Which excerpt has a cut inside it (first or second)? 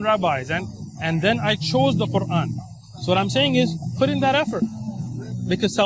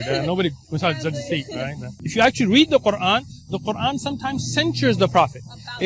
second